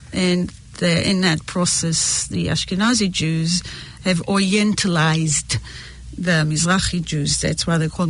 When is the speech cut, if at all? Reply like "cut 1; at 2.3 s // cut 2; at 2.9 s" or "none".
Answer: none